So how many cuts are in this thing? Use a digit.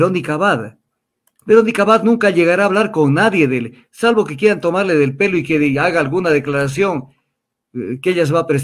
0